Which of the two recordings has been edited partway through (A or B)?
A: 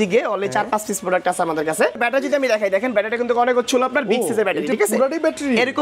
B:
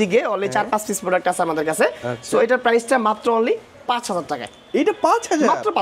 A